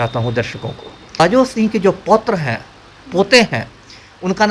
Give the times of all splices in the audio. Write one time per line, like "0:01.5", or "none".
0:01.2